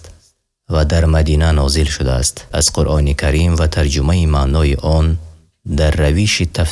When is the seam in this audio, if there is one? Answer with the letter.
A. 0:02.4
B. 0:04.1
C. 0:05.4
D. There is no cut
A